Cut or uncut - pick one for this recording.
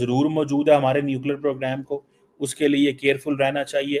uncut